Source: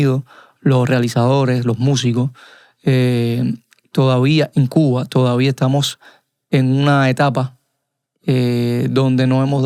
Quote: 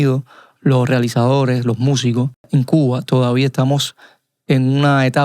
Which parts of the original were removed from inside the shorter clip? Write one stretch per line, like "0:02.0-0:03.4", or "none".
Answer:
0:02.5-0:04.5